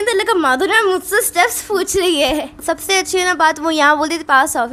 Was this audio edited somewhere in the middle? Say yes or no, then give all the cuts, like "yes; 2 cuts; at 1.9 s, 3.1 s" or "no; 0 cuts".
yes; 1 cut; at 2.5 s